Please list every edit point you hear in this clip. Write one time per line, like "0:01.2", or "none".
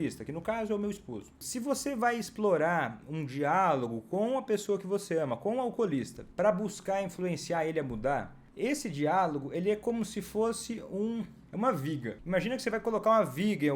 0:01.4
0:06.2
0:08.4
0:11.4
0:12.2